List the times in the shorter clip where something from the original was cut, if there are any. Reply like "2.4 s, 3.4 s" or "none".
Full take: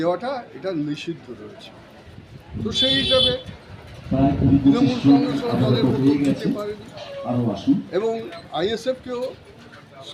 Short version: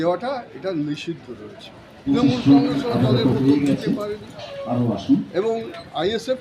2.1 s